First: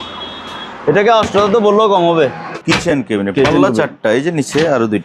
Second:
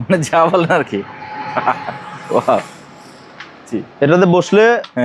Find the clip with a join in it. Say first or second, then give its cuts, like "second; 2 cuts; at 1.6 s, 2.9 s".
first; 1 cut; at 2.5 s